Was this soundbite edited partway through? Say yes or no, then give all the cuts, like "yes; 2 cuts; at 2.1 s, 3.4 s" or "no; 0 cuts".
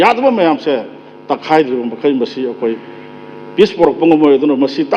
no; 0 cuts